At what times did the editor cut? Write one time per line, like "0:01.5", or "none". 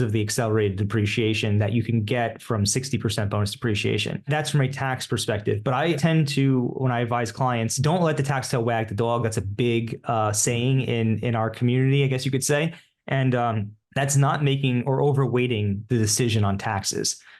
0:04.2
0:06.0
0:07.8
0:13.8